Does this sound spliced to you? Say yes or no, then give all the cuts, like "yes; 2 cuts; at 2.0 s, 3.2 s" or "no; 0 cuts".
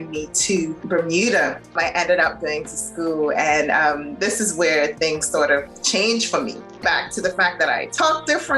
yes; 4 cuts; at 0.8 s, 1.7 s, 5.7 s, 6.8 s